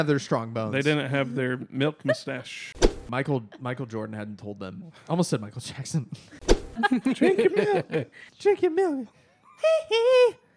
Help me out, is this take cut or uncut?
cut